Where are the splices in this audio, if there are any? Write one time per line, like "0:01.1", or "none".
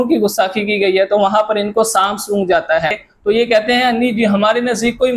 0:03.1